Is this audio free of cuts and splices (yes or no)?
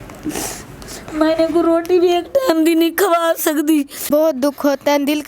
no